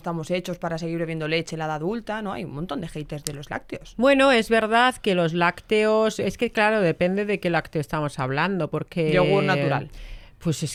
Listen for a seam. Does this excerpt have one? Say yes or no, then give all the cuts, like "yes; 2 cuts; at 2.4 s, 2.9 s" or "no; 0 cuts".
no; 0 cuts